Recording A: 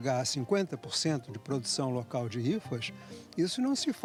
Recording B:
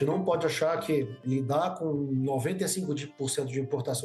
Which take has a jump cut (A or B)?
B